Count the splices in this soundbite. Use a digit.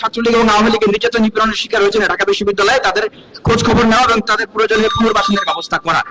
0